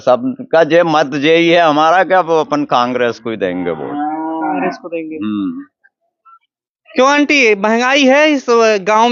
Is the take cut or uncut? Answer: uncut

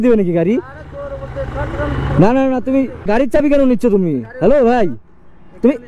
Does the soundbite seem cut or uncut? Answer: cut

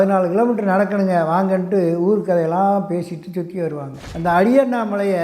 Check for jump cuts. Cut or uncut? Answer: cut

